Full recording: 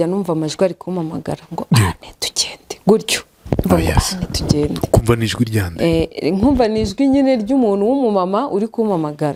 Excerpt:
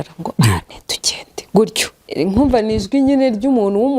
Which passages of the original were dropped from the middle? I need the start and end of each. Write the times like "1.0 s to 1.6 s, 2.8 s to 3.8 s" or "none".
3.4 s to 6.1 s